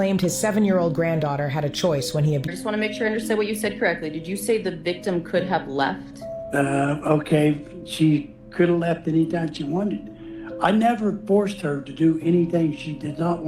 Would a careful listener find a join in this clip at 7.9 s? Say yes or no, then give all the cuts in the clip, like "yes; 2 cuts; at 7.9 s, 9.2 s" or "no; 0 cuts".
no; 1 cut; at 2.5 s